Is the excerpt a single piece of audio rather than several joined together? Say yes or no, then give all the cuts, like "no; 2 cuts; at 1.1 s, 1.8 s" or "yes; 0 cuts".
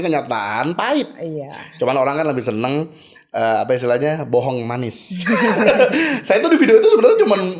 yes; 0 cuts